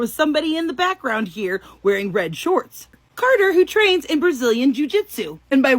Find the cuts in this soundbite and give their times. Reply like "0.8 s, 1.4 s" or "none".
2.9 s